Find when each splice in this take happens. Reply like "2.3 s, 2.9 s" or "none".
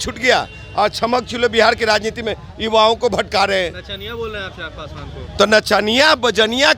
none